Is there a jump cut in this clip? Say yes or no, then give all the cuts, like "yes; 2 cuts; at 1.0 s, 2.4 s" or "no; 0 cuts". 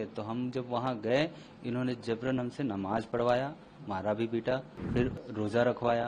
yes; 1 cut; at 4.8 s